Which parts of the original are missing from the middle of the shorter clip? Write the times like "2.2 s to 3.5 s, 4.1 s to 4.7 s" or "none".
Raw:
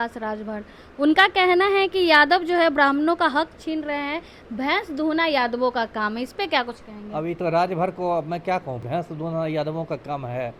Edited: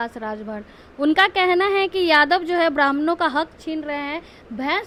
none